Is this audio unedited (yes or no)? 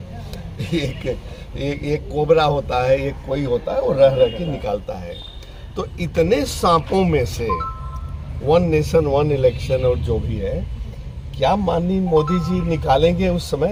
yes